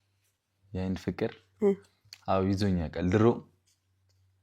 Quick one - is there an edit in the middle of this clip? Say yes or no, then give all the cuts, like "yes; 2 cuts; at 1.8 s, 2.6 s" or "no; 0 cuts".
no; 0 cuts